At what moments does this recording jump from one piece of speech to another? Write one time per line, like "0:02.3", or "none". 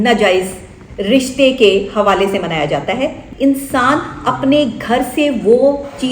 0:03.3